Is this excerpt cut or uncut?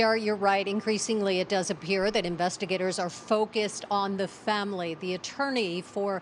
cut